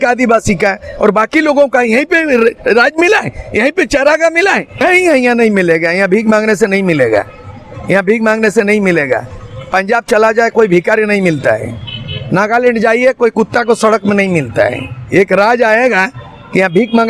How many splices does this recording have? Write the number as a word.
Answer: one